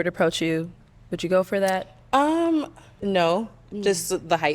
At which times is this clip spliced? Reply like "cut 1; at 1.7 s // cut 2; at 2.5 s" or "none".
cut 1; at 2.8 s